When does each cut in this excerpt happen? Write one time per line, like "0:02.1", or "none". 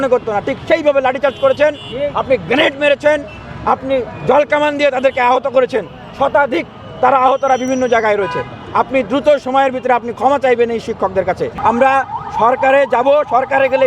0:11.6